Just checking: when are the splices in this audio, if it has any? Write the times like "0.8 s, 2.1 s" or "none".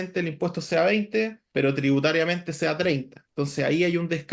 1.4 s, 3.2 s